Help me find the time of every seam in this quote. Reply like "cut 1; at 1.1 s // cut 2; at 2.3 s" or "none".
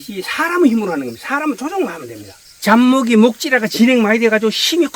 cut 1; at 2.5 s